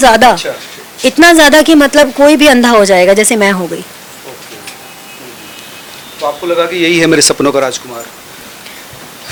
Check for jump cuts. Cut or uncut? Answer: uncut